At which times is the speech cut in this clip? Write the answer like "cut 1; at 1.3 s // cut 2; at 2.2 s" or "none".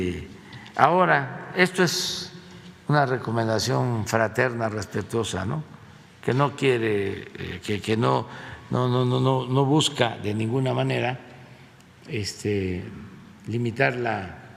none